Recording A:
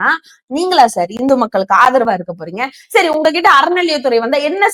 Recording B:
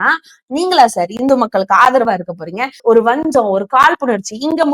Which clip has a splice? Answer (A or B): B